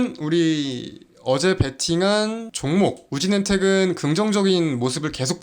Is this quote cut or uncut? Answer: cut